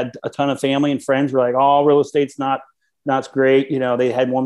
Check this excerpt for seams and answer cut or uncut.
uncut